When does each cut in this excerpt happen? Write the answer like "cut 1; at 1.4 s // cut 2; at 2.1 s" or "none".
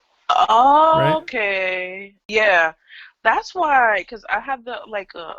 cut 1; at 2.2 s